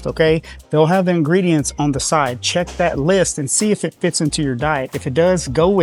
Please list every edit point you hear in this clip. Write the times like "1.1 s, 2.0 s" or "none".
none

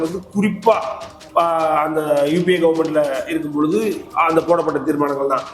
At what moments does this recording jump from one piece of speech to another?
none

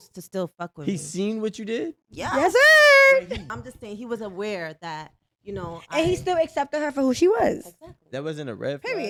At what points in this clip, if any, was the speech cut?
none

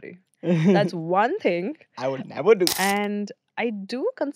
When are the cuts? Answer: 2.7 s

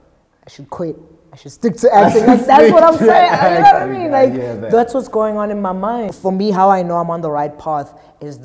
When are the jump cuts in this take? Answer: 6.1 s

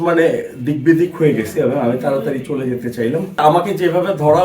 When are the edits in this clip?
3.4 s

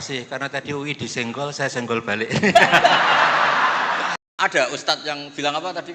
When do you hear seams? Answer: 4.2 s

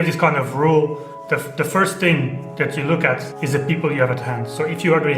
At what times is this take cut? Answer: 3.3 s

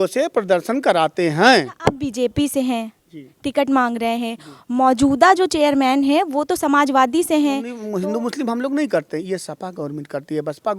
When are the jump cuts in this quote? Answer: 1.7 s, 7.8 s

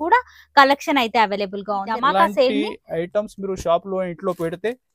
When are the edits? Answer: 2.0 s

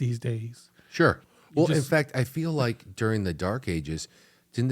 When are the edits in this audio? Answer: 1.2 s

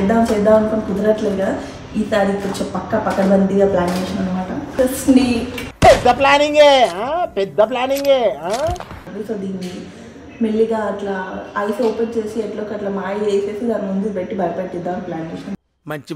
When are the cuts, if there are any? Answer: 4.6 s, 9.1 s

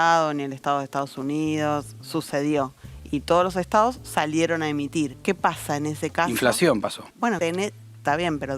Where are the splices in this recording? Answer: 5.2 s, 7.3 s

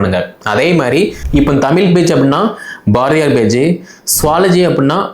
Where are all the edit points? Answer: 1.2 s

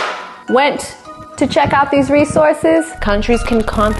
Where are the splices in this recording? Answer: 2.9 s

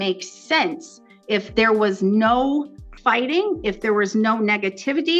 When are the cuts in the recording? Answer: 2.8 s

